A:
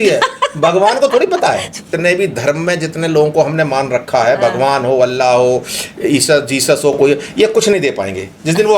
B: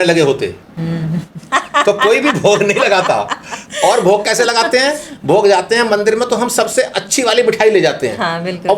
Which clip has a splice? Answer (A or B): A